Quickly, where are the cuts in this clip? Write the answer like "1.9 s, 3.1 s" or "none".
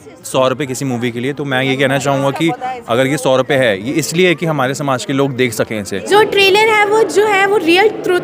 5.9 s